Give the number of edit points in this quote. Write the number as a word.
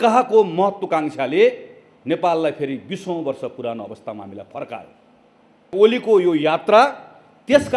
one